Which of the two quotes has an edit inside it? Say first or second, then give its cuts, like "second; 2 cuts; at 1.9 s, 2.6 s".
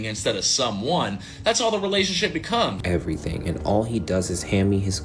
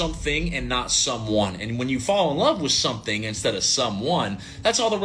first; 1 cut; at 2.8 s